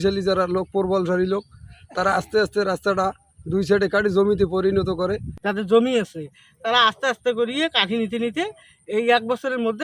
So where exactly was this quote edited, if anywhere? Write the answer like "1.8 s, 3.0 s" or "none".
5.4 s

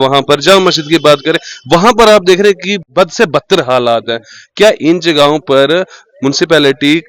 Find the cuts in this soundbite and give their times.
2.8 s

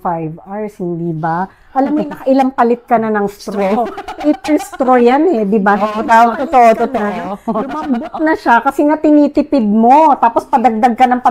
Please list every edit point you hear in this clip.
none

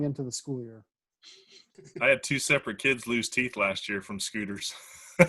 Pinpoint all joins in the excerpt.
1.8 s

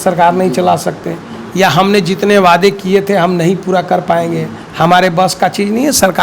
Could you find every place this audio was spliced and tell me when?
none

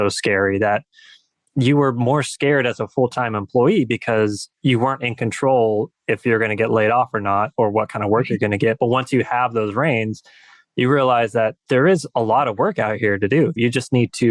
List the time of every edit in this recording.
4.5 s, 13.6 s

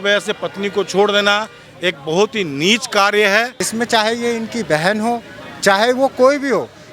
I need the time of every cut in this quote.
3.6 s

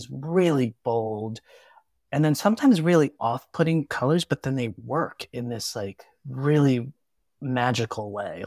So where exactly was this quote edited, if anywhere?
none

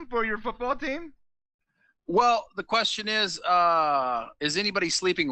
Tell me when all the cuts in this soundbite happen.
none

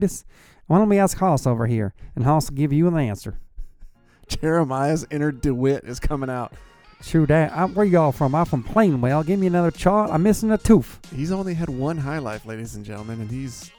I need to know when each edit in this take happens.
none

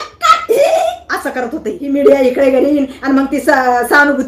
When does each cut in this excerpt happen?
1.8 s

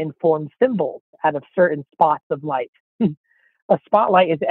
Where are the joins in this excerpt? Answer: none

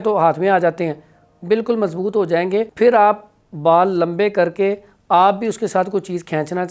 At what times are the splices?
2.7 s

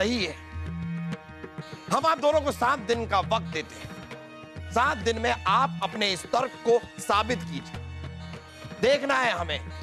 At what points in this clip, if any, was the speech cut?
none

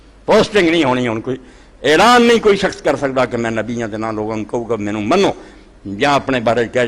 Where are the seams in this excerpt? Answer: none

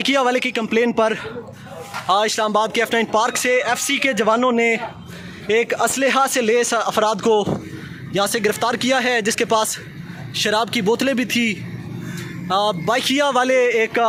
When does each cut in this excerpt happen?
none

